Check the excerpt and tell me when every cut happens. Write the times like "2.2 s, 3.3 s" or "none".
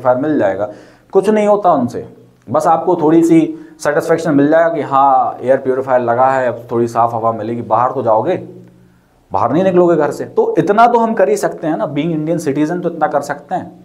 10.2 s